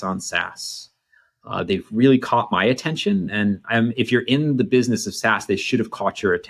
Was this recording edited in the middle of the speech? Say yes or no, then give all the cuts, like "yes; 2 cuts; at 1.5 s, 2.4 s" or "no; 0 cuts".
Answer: no; 0 cuts